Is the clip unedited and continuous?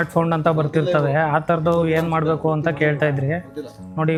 yes; 0 cuts

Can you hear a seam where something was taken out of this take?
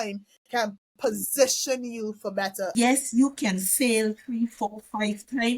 yes; 1 cut; at 2.7 s

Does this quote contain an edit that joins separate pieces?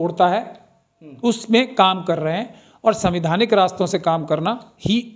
no; 0 cuts

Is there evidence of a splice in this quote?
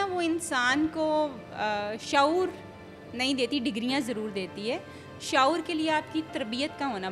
no; 0 cuts

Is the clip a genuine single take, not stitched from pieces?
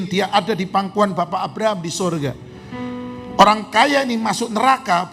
yes; 0 cuts

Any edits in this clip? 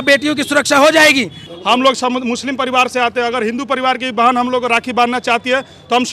yes; 1 cut; at 1.4 s

